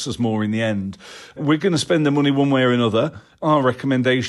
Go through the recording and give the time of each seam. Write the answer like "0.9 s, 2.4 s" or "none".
1.4 s, 3.3 s